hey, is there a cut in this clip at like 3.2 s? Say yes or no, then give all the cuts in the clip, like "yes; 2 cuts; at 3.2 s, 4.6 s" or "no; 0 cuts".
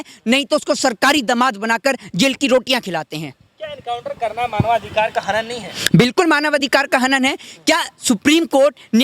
no; 0 cuts